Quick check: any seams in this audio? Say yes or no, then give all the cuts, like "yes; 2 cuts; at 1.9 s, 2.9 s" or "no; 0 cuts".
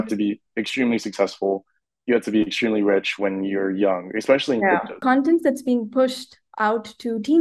yes; 1 cut; at 5.0 s